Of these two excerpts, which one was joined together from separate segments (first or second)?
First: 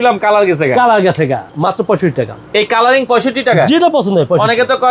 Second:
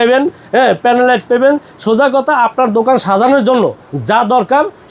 first